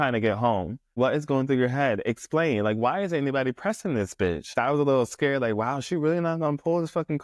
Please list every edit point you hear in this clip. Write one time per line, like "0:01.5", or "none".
0:00.9
0:04.5